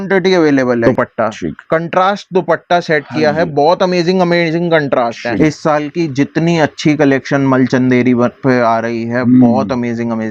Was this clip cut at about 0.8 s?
yes; 2 cuts; at 0.8 s, 5.4 s

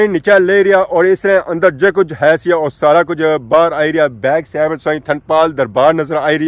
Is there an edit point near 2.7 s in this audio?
no; 0 cuts

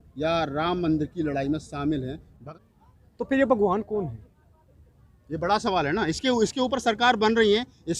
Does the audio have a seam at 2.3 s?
yes; 1 cut; at 2.3 s

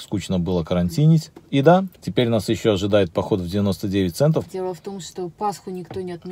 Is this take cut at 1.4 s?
yes; 3 cuts; at 1.4 s, 2.0 s, 4.5 s

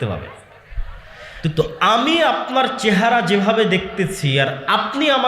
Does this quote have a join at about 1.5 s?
yes; 1 cut; at 1.5 s

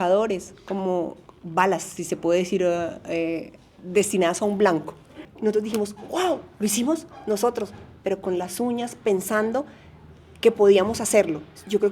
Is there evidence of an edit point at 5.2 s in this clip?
yes; 1 cut; at 5.2 s

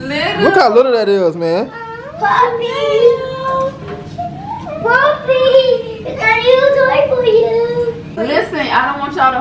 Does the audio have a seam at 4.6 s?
no; 1 cut; at 8.1 s

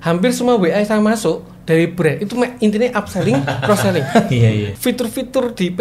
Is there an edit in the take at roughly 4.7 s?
yes; 1 cut; at 4.7 s

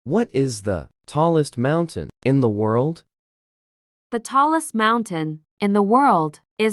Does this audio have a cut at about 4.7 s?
no; 1 cut; at 1.0 s

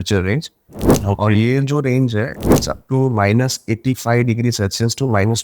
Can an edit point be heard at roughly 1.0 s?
yes; 1 cut; at 1.0 s

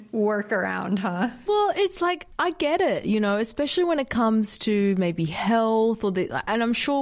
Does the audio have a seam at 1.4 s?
yes; 1 cut; at 1.4 s

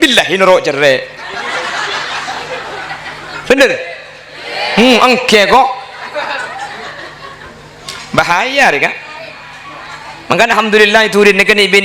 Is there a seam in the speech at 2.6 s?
no; 0 cuts

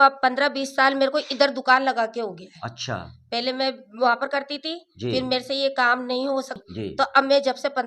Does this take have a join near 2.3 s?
no; 1 cut; at 6.5 s

